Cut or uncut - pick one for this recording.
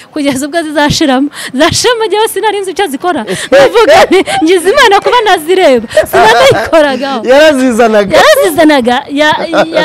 uncut